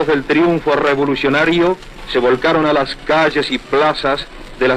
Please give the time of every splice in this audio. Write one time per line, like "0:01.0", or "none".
0:01.9